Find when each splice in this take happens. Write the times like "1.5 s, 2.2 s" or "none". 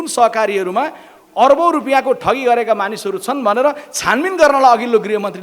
none